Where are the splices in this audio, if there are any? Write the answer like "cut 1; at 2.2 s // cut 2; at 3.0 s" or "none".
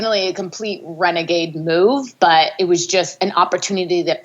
cut 1; at 2.9 s